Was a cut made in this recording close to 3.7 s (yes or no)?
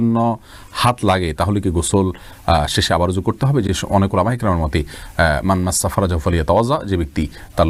no